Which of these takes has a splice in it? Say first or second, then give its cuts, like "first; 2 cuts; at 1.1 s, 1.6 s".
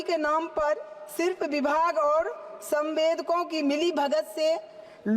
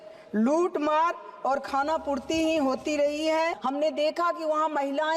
second; 1 cut; at 3.6 s